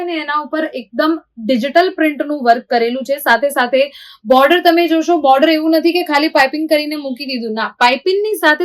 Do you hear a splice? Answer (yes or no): no